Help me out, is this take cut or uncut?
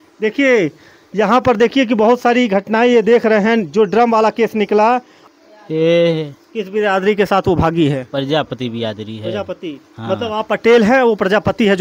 cut